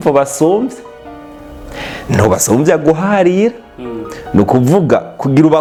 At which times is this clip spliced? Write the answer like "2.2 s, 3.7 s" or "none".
none